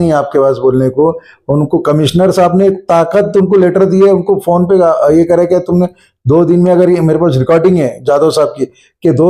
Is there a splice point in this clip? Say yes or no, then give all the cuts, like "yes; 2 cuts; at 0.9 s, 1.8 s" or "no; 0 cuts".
no; 0 cuts